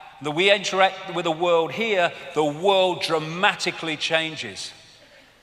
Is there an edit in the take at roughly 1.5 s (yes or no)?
no